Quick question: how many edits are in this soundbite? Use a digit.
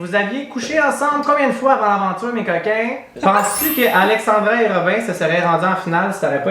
1